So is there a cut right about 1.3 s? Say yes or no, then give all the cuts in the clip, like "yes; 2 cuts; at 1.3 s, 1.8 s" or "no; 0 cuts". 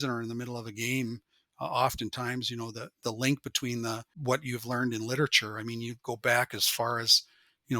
no; 1 cut; at 4.1 s